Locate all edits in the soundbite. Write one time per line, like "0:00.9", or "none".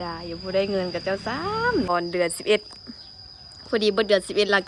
0:01.9